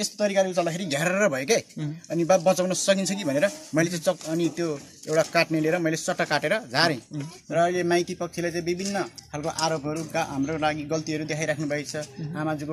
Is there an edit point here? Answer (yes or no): yes